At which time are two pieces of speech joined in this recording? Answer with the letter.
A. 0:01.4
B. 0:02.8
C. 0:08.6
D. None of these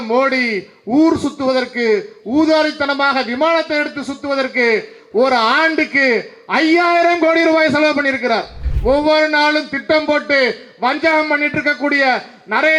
C